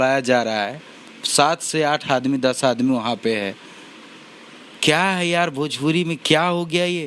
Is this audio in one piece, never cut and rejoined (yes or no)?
yes